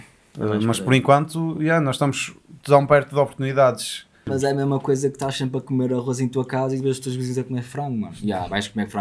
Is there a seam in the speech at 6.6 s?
no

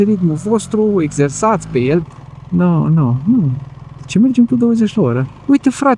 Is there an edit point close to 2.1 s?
yes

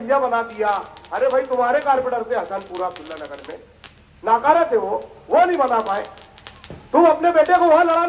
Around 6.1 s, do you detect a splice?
no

